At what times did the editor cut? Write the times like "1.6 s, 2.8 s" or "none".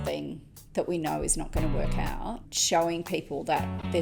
2.5 s